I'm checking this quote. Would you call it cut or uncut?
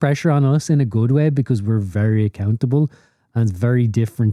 uncut